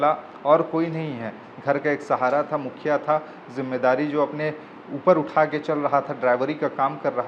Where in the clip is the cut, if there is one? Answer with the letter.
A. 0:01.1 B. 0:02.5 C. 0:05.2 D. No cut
D